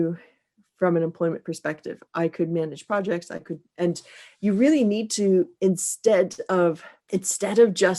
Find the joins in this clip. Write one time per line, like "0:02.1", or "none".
0:06.9